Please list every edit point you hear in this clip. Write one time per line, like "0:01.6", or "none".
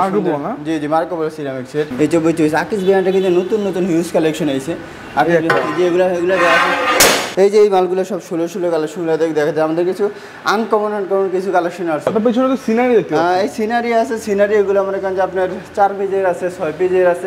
0:01.9
0:07.3
0:12.1